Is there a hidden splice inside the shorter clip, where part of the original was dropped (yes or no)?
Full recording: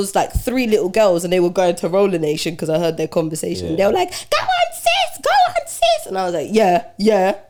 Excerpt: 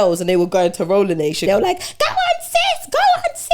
yes